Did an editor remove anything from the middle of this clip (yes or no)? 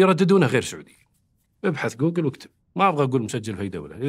yes